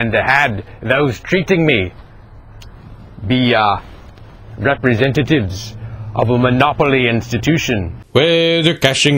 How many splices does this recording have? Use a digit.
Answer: 1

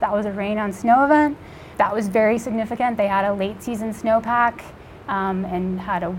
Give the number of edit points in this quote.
0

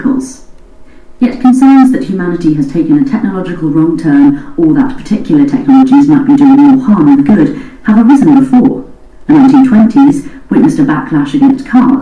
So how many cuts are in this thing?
2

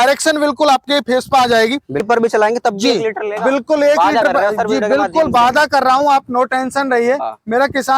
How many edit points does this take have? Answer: 1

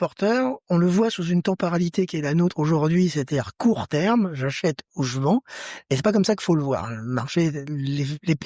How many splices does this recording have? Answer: 0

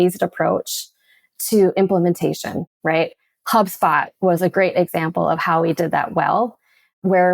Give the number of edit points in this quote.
1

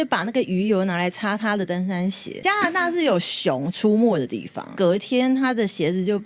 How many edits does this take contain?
2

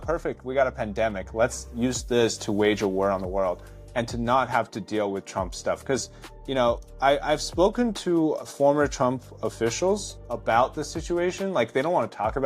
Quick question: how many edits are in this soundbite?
3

